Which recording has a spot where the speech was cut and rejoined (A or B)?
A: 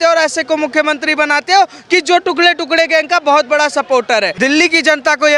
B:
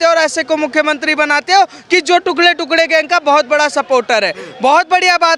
A